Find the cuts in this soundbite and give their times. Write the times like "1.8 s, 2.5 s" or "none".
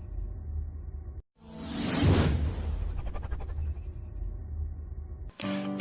none